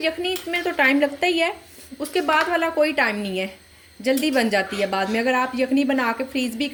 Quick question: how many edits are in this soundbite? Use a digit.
0